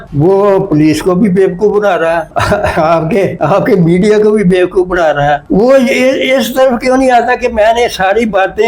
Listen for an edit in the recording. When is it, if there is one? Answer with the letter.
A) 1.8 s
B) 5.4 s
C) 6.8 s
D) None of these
D